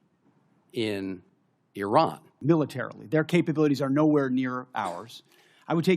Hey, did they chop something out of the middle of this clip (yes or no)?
yes